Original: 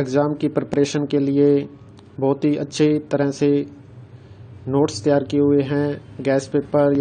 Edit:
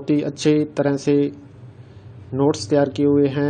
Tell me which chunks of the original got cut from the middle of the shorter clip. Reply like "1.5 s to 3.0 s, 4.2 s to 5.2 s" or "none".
none